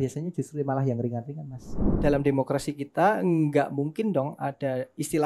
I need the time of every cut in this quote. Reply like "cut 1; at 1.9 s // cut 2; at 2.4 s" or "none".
cut 1; at 2.0 s